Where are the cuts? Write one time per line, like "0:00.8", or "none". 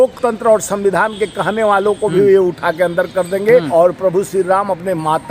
0:03.7